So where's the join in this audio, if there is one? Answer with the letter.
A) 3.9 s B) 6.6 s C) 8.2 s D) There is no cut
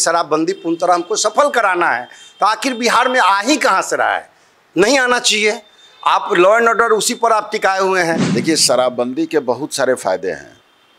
C